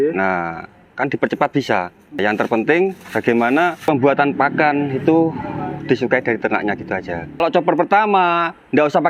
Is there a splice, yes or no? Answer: yes